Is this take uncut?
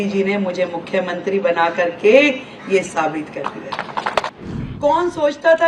no; 1 cut; at 4.3 s

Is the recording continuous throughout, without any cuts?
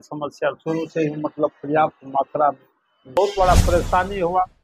no; 1 cut; at 3.2 s

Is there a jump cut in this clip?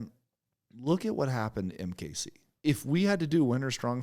yes; 1 cut; at 2.5 s

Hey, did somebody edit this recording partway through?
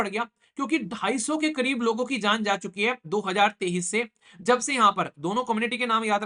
no; 0 cuts

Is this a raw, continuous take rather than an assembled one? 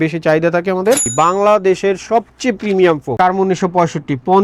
no; 2 cuts; at 1.0 s, 3.2 s

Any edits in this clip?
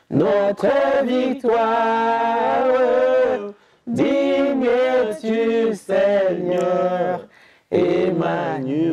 no; 0 cuts

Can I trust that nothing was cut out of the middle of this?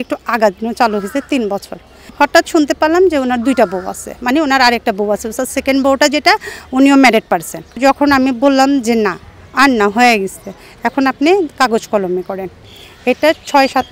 no; 2 cuts; at 2.1 s, 7.8 s

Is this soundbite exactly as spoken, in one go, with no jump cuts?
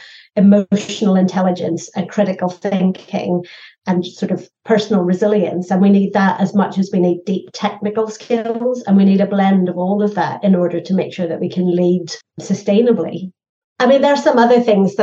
yes; 0 cuts

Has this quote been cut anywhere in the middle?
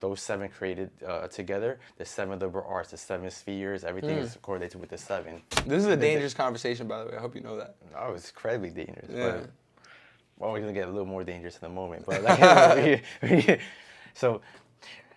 yes; 1 cut; at 5.4 s

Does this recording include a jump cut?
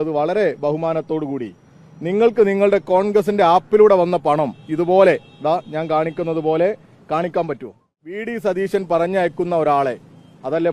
yes; 1 cut; at 8.2 s

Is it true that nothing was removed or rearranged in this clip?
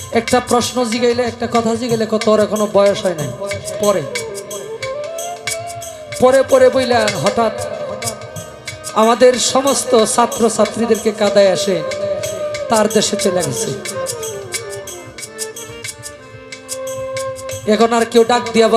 yes; 0 cuts

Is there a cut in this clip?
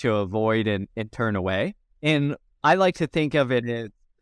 yes; 1 cut; at 2.4 s

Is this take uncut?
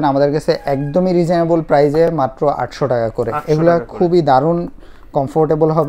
yes; 0 cuts

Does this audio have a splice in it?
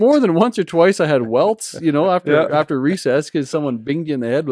no; 0 cuts

